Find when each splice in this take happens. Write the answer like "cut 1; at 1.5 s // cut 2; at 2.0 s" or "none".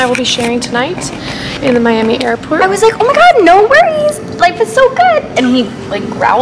cut 1; at 2.6 s